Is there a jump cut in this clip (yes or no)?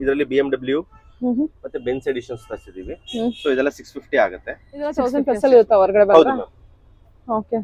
yes